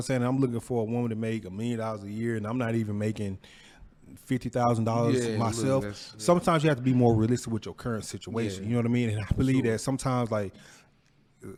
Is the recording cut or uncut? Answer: uncut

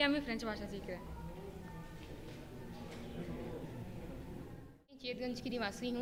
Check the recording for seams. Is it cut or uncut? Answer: uncut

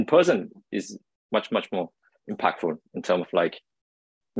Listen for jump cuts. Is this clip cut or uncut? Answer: uncut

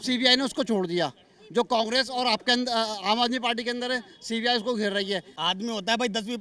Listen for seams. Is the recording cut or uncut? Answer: cut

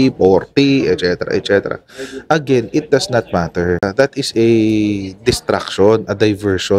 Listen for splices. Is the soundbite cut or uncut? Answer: cut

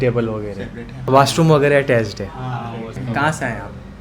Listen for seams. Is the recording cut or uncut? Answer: cut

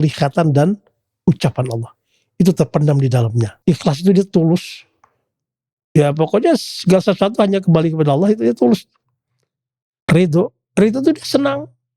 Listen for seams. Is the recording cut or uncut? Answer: cut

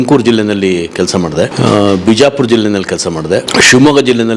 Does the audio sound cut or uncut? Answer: cut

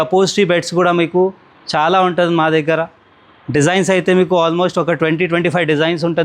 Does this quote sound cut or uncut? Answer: uncut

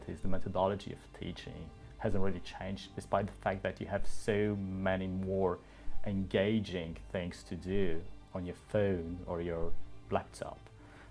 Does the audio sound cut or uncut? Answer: uncut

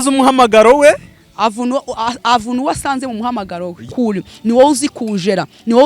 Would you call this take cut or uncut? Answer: cut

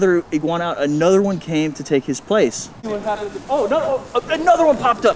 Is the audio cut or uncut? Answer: cut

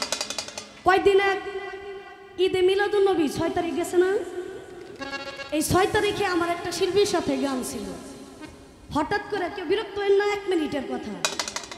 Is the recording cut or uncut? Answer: uncut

